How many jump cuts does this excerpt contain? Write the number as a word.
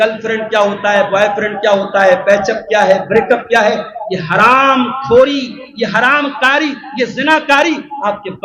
zero